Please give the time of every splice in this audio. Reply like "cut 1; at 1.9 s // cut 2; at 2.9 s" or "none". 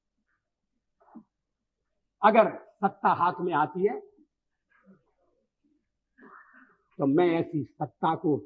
none